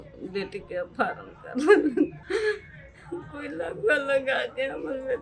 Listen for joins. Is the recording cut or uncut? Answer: cut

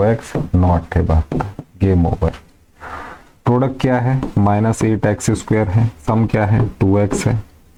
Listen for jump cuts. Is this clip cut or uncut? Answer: uncut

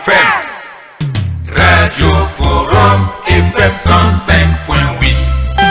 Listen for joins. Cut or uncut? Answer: uncut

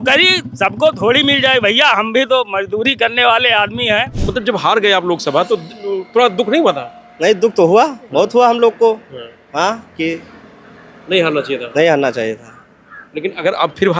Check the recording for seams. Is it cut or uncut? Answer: cut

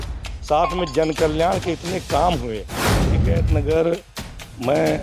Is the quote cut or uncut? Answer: cut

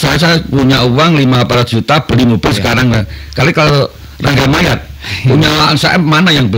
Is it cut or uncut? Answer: uncut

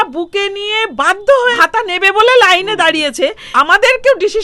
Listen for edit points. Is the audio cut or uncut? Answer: cut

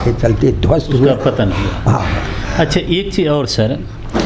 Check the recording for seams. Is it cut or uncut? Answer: uncut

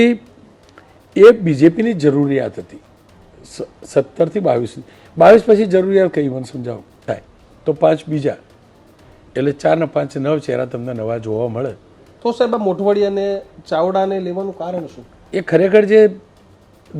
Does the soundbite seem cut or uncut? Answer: cut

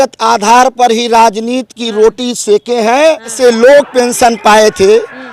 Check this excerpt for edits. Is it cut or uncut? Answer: cut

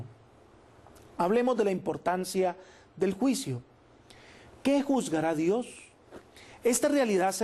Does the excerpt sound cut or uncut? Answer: cut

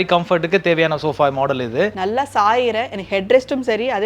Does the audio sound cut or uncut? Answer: cut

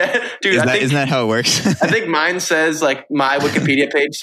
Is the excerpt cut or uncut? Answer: uncut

